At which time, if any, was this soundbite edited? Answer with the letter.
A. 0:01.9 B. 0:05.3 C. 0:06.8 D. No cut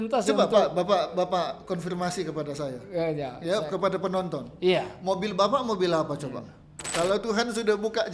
C